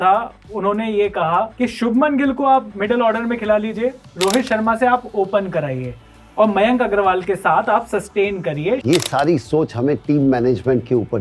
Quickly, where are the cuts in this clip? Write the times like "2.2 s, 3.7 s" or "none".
1.5 s, 8.8 s